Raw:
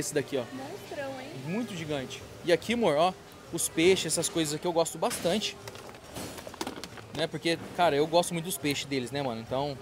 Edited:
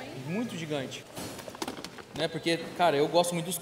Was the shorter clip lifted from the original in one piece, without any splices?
no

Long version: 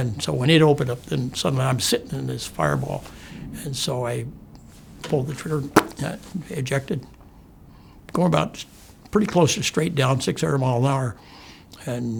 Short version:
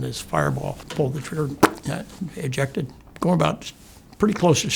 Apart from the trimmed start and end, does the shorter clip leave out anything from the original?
yes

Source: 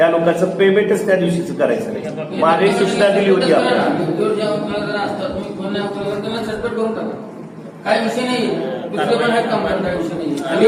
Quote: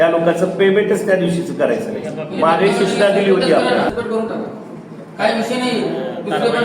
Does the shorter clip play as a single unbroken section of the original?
no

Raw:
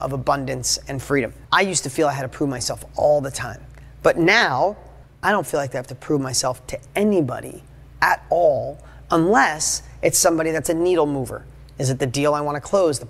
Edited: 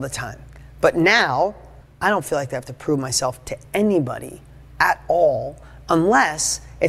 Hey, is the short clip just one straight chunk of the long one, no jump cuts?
yes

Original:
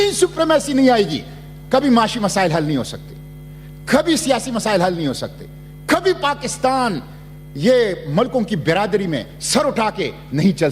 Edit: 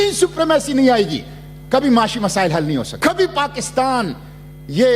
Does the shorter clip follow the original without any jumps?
no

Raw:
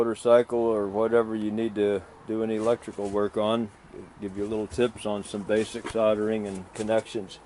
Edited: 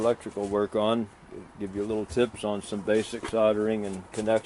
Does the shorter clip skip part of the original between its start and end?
no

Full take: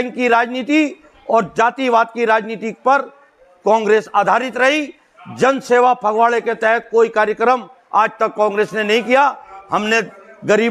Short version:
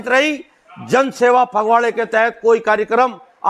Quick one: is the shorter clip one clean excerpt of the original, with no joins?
yes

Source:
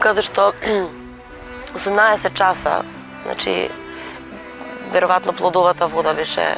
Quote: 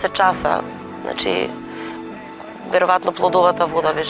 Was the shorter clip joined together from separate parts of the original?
no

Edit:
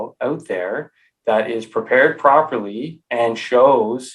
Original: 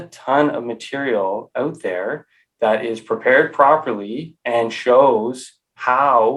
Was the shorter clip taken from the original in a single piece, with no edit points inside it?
yes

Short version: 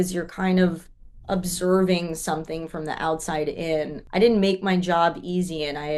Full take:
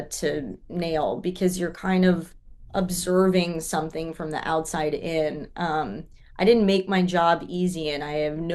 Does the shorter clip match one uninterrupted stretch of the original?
no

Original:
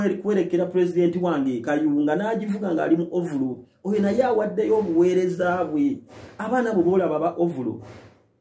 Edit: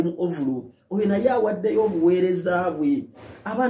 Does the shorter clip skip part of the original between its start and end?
no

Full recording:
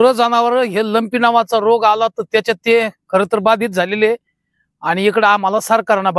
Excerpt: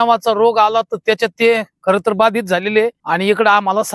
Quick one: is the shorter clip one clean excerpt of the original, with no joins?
no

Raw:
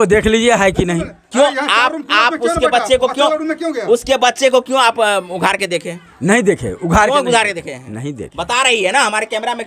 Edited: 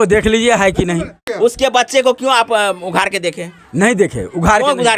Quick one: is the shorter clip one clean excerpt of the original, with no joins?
no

